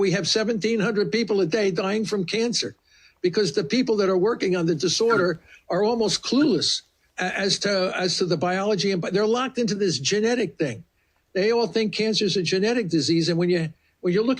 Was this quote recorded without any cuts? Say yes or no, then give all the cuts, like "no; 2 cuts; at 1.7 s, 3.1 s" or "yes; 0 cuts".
yes; 0 cuts